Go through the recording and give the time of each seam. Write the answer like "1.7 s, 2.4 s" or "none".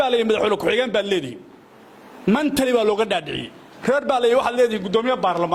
none